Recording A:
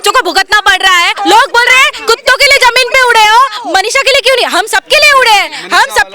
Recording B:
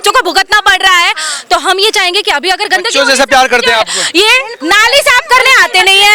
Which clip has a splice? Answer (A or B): A